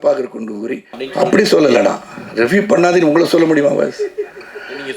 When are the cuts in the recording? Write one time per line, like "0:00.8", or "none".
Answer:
0:01.0